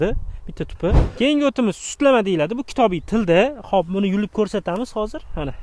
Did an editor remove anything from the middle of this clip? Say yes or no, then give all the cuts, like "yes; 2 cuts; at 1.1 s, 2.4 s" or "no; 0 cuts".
yes; 1 cut; at 1.1 s